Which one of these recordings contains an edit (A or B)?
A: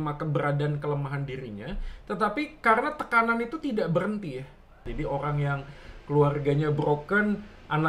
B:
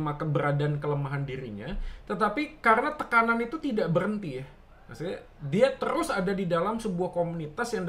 A